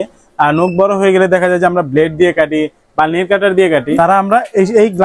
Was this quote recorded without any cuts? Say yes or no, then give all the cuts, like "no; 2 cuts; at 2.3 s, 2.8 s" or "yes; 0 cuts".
no; 1 cut; at 3.9 s